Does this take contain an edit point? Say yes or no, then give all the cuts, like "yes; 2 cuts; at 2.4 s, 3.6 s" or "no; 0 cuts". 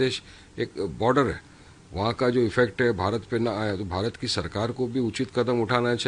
no; 0 cuts